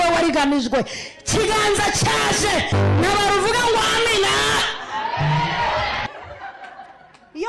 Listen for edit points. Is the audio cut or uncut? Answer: cut